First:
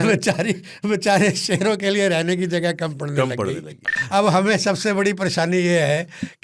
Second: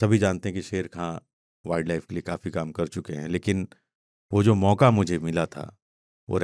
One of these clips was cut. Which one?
first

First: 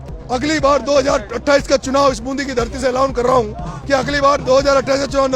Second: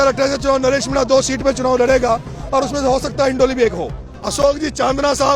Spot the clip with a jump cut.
second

